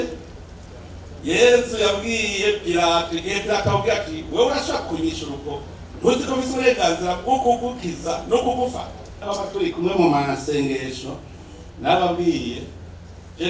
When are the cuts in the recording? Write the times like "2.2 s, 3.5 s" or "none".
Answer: 9.3 s